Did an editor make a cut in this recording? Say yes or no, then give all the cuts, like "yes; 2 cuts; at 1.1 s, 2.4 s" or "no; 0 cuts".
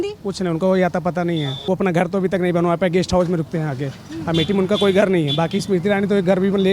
yes; 1 cut; at 1.5 s